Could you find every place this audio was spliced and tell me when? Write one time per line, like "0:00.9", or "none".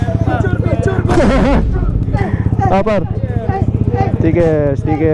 none